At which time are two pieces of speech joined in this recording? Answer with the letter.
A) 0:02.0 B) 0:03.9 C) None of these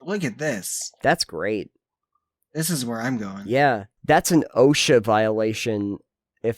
B